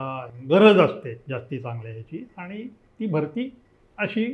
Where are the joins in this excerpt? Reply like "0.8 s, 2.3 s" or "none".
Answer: 1.2 s